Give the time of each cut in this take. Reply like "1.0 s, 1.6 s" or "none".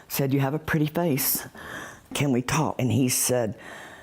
2.7 s